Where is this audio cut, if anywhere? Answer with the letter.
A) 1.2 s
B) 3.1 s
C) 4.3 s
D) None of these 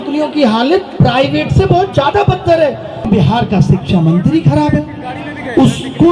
B